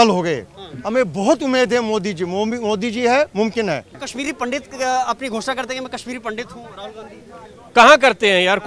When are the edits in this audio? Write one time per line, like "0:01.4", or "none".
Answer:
0:04.0